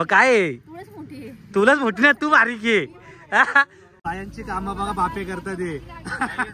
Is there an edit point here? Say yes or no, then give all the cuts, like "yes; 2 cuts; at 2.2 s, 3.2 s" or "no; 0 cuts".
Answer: yes; 1 cut; at 3.9 s